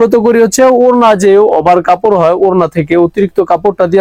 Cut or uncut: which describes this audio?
uncut